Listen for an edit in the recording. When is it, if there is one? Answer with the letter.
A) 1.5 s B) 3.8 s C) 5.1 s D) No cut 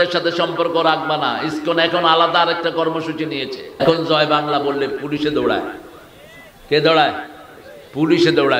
B